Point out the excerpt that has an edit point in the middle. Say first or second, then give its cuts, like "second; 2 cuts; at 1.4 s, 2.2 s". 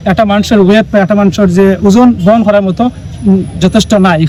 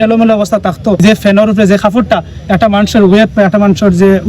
second; 1 cut; at 1.0 s